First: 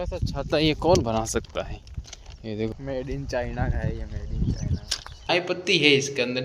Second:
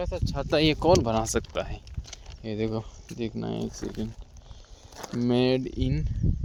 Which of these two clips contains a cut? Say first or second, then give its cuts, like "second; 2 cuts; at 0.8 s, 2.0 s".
first; 2 cuts; at 2.7 s, 5.3 s